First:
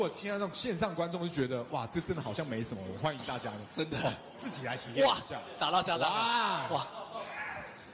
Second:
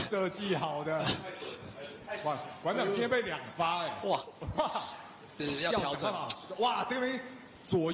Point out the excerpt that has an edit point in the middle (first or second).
second